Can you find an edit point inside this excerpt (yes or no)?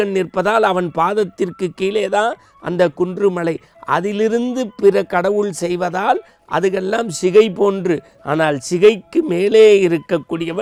no